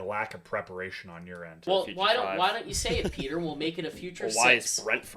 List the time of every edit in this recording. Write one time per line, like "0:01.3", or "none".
0:01.5

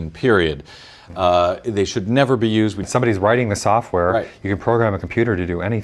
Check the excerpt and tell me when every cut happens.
0:02.9

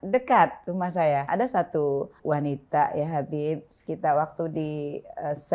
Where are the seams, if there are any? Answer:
0:01.3

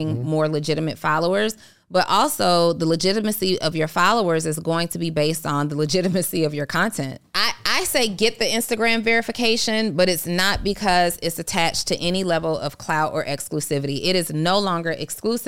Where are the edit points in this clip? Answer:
0:07.3

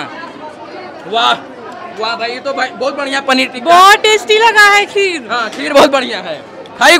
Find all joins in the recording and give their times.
none

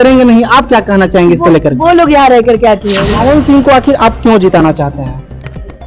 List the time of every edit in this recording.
0:03.0

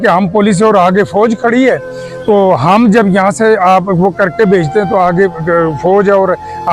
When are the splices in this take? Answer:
none

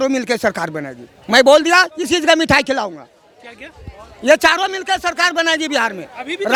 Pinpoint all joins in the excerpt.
none

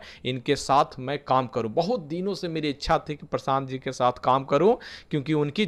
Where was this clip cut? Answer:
none

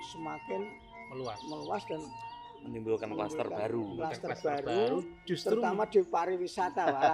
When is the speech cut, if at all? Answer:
none

